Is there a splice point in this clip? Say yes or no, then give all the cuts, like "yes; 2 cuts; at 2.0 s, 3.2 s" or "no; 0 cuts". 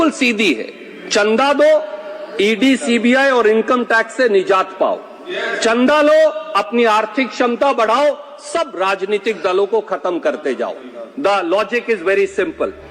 no; 0 cuts